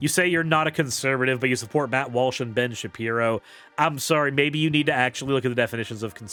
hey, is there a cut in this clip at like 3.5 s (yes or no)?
no